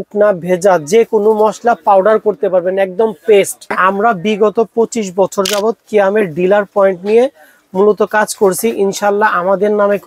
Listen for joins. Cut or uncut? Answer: cut